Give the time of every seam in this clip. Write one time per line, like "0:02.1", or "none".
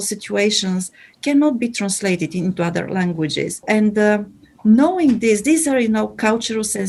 none